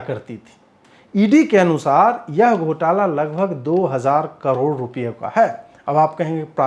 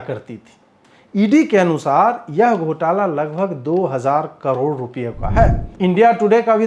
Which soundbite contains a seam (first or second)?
second